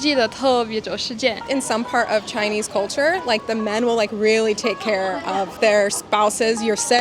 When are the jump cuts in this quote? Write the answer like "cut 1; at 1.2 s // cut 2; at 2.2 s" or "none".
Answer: cut 1; at 1.4 s // cut 2; at 3.4 s // cut 3; at 5.5 s